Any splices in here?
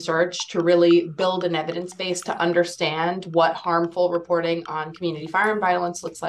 no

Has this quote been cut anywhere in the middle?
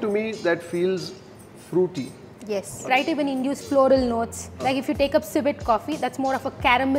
yes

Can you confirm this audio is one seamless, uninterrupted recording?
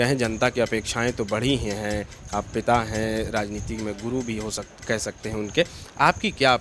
yes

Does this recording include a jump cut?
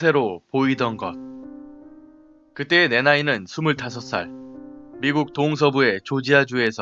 yes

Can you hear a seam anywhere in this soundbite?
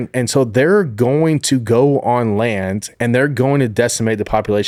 no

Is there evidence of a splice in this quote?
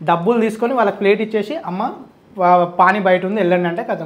no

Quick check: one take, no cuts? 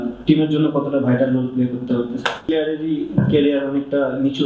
no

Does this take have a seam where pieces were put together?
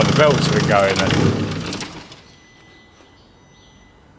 yes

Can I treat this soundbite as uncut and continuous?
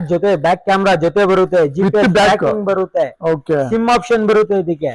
yes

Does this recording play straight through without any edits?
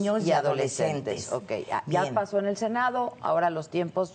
yes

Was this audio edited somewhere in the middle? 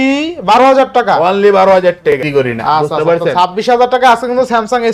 yes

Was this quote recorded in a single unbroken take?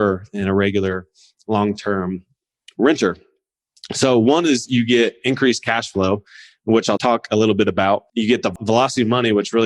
no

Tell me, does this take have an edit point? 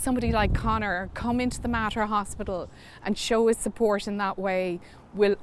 no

